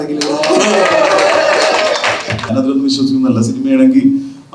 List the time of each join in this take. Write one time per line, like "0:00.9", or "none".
0:02.5